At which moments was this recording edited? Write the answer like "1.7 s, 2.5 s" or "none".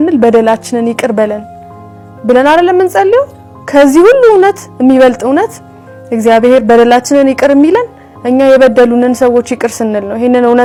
none